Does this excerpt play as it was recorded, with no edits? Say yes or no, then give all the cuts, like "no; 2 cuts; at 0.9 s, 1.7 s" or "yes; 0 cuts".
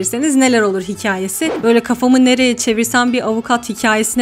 no; 1 cut; at 1.5 s